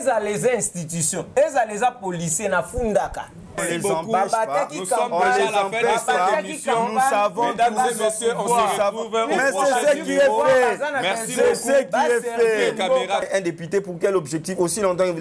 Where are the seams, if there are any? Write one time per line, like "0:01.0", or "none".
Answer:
0:03.6
0:13.3